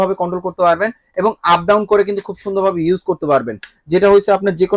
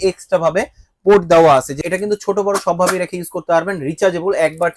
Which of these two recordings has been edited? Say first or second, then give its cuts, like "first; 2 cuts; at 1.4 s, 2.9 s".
second; 1 cut; at 1.8 s